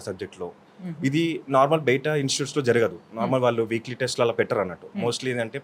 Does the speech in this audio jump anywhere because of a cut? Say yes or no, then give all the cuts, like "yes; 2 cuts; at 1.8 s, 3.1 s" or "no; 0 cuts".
no; 0 cuts